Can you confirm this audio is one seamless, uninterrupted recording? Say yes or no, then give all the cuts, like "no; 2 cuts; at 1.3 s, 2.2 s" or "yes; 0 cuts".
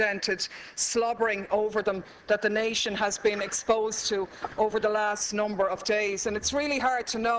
no; 1 cut; at 3.5 s